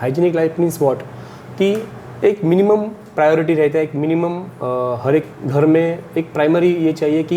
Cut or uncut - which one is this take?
cut